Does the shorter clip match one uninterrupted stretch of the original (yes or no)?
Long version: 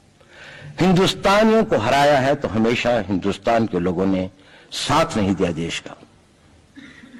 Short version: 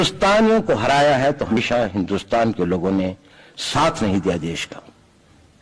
no